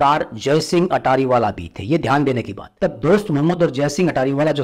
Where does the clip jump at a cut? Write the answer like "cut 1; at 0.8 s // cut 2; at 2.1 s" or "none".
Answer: cut 1; at 2.6 s